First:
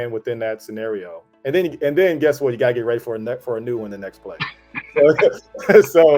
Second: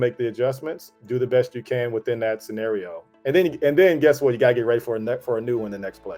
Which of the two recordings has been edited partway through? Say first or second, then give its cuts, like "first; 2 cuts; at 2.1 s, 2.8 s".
second; 1 cut; at 0.9 s